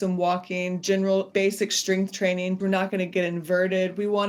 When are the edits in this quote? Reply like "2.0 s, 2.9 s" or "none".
1.3 s, 2.6 s